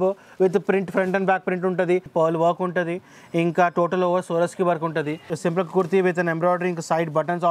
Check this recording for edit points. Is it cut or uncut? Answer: cut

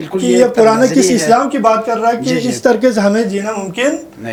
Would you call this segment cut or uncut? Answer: uncut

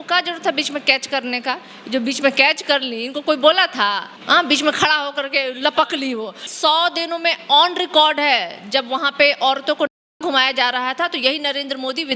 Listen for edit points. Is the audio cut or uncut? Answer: cut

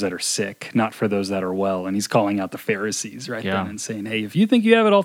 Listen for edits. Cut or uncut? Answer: uncut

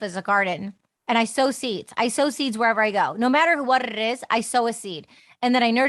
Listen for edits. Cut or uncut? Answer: uncut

